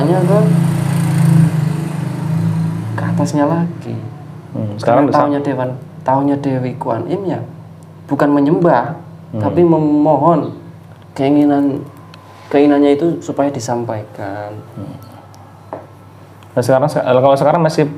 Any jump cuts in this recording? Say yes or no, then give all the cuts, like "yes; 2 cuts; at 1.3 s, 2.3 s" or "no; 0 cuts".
no; 0 cuts